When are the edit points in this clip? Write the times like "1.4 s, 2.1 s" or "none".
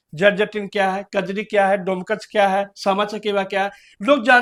none